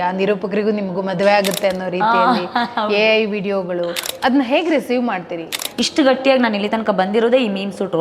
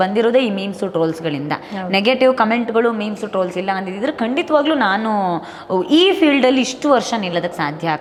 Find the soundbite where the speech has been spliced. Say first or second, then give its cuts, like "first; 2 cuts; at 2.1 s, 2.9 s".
first; 2 cuts; at 4.1 s, 5.6 s